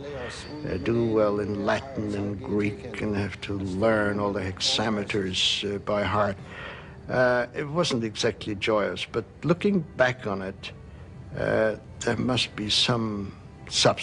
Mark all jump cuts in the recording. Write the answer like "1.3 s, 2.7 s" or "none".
11.9 s

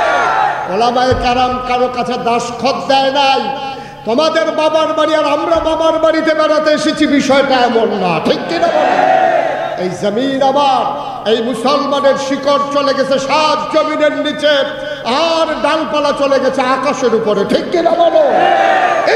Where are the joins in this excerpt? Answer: none

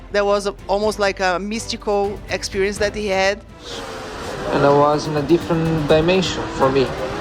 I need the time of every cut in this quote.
3.6 s

